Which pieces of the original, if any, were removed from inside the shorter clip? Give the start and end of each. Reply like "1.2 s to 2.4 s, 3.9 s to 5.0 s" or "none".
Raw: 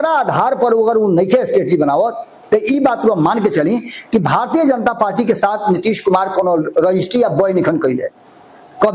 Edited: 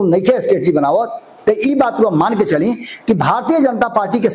none